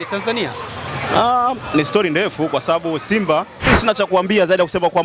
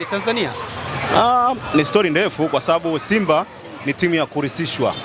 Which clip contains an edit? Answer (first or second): first